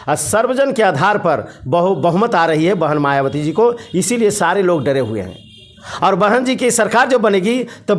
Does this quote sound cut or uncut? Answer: uncut